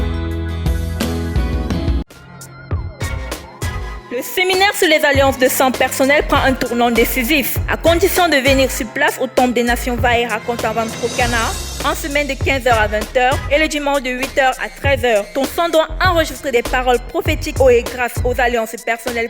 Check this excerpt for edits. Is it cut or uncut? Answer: cut